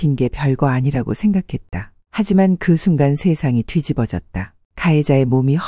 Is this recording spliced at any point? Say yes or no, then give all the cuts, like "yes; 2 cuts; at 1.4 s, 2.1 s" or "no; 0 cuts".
no; 0 cuts